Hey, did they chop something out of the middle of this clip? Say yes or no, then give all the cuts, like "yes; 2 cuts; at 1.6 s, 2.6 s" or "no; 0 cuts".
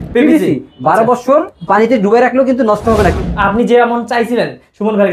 yes; 2 cuts; at 1.6 s, 3.2 s